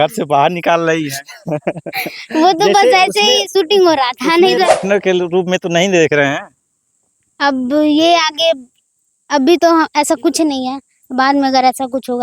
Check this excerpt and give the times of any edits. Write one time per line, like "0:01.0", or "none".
0:04.7